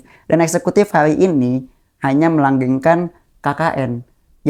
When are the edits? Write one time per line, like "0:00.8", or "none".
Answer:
none